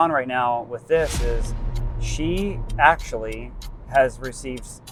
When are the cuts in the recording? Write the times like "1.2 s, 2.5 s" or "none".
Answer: none